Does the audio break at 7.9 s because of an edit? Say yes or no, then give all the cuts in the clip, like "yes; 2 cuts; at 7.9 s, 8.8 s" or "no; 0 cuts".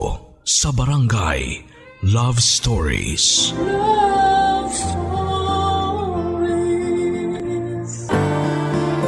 yes; 1 cut; at 7.9 s